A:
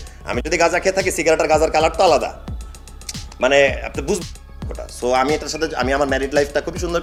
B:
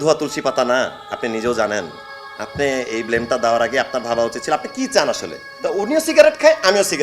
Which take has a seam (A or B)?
B